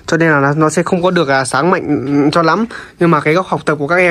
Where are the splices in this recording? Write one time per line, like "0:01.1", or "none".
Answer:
none